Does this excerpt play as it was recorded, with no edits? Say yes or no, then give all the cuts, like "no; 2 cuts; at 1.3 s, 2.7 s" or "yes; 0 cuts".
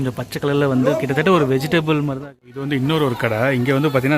no; 1 cut; at 2.3 s